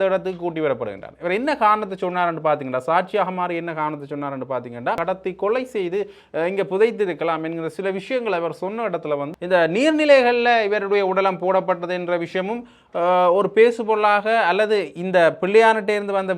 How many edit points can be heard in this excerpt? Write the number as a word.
two